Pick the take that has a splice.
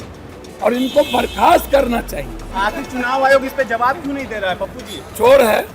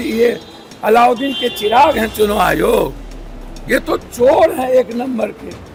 first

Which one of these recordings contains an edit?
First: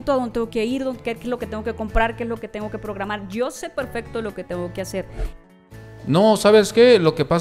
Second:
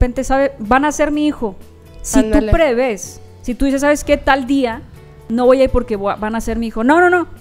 first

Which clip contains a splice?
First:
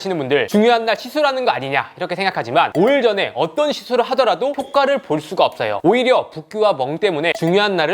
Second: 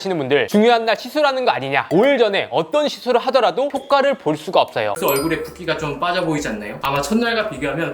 second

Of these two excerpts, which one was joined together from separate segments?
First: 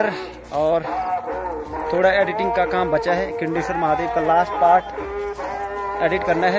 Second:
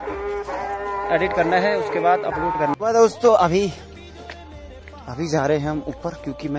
second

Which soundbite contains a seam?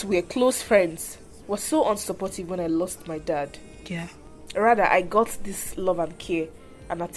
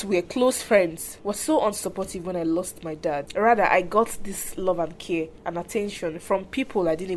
second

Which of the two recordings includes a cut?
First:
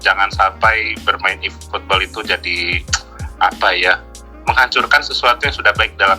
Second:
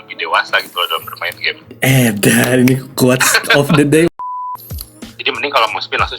second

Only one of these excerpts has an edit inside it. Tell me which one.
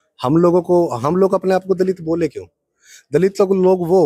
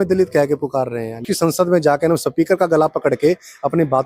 second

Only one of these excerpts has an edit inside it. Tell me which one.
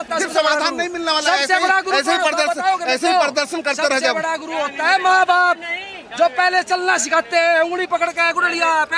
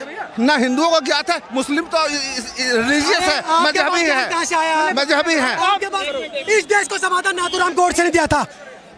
second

